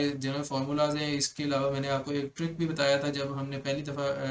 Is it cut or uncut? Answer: uncut